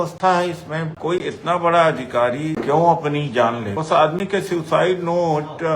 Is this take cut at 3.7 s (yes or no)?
yes